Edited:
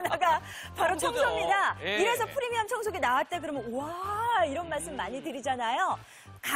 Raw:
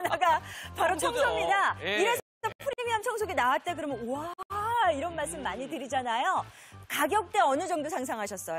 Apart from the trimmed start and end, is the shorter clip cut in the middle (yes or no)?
yes